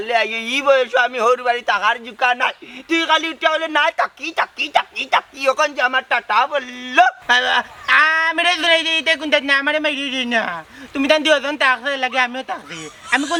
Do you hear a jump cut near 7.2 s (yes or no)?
no